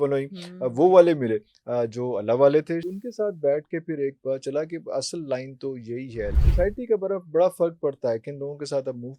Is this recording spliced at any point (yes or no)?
yes